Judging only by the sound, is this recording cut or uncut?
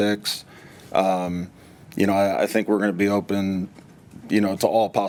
uncut